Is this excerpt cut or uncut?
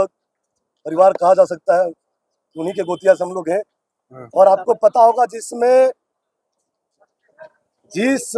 uncut